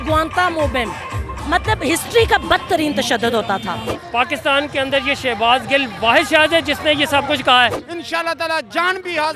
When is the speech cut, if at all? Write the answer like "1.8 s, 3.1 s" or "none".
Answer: 1.3 s, 3.9 s, 7.9 s